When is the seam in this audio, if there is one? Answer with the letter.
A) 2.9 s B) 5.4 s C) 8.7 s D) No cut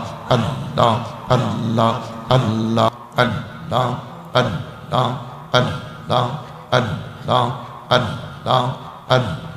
A